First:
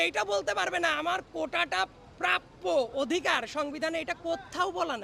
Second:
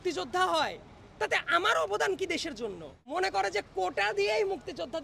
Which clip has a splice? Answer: second; 1 cut; at 2.9 s

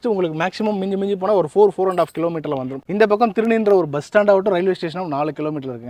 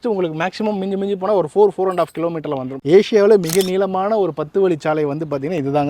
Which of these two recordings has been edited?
second; 1 cut; at 2.8 s

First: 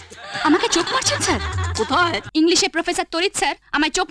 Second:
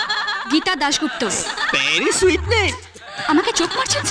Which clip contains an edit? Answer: first; 1 cut; at 2.2 s

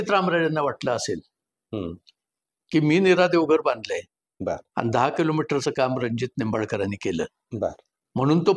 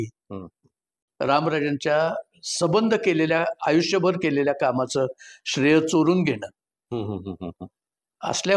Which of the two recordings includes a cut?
second; 1 cut; at 1.1 s

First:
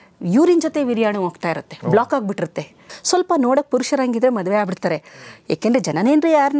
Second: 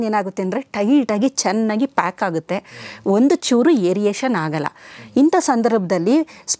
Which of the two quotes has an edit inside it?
first; 1 cut; at 2.9 s

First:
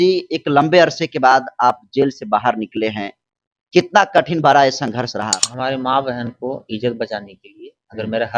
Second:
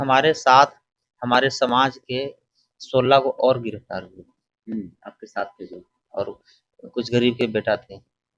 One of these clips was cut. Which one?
first; 1 cut; at 5.4 s

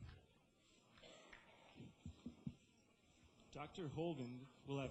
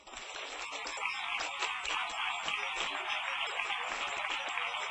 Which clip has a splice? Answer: first; 1 cut; at 1.6 s

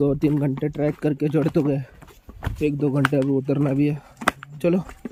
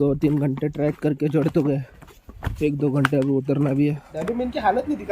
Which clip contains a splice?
second; 1 cut; at 4.2 s

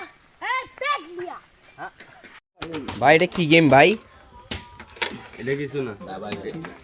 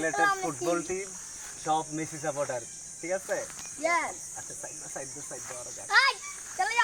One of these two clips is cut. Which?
first; 1 cut; at 2.5 s

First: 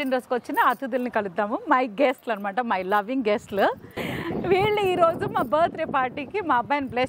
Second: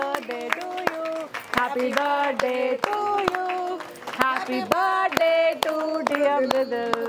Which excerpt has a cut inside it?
first; 1 cut; at 4.0 s

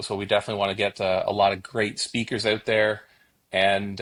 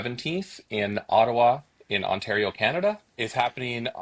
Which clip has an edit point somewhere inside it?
second; 1 cut; at 3.1 s

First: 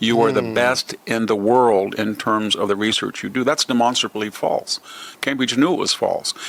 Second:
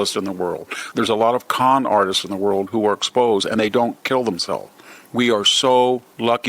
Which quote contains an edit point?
second; 1 cut; at 5.0 s

